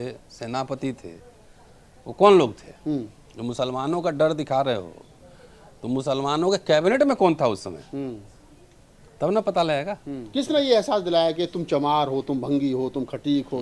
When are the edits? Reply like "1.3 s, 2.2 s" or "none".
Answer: 10.1 s